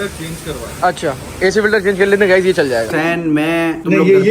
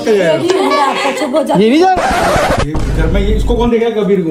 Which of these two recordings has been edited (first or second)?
first